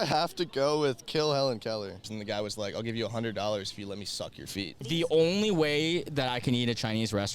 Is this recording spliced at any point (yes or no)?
yes